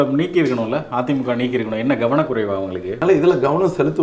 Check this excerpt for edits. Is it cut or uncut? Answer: cut